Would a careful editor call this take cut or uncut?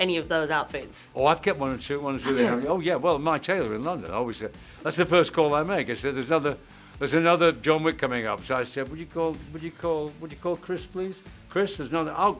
uncut